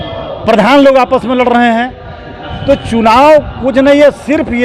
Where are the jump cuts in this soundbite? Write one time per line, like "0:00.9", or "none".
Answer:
none

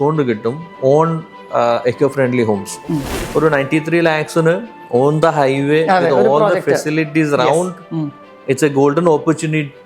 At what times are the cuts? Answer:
0:03.1

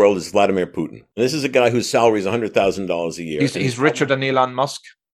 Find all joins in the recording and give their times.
0:01.0

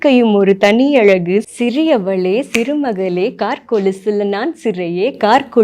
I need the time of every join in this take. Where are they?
0:01.4

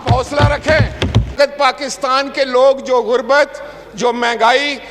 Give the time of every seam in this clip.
0:01.3

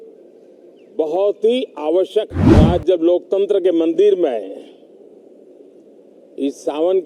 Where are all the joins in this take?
0:02.5

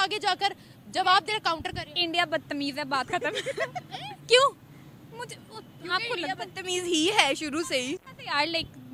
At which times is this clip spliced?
none

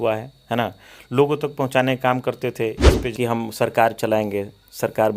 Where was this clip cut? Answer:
0:03.0

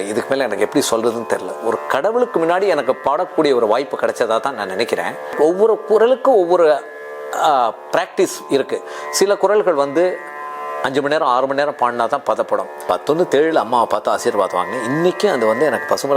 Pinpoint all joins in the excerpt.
0:05.4
0:12.8

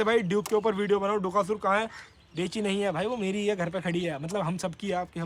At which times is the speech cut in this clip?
none

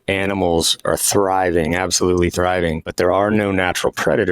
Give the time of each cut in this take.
0:02.9

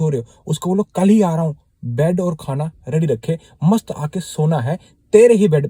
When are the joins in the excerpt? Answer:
none

